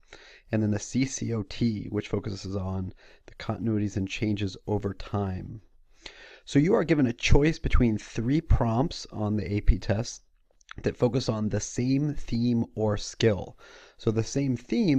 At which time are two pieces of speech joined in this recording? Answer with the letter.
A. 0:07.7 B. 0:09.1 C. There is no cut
A